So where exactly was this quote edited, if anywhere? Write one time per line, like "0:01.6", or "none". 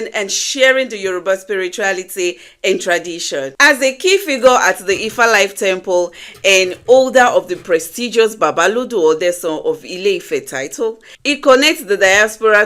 0:11.1